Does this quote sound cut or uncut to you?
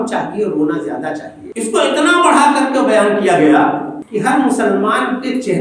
cut